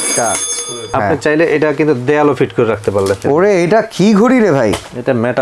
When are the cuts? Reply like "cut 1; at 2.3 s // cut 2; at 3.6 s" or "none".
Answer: cut 1; at 0.9 s // cut 2; at 3.2 s